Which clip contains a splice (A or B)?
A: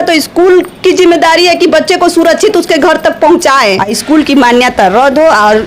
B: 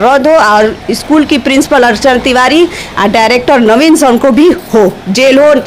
A